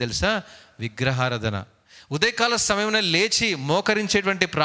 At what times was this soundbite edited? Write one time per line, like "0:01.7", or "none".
0:01.8